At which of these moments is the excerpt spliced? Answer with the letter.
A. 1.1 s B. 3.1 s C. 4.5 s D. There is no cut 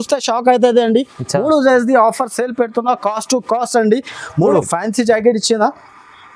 C